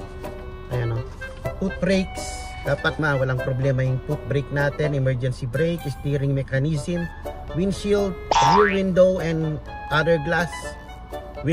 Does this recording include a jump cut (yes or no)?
yes